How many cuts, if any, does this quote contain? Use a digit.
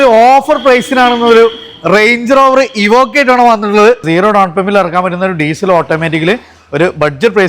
1